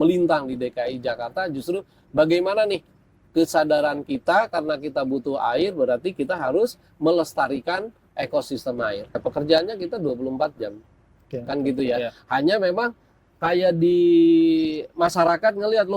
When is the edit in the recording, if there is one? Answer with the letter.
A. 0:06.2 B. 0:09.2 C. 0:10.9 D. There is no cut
B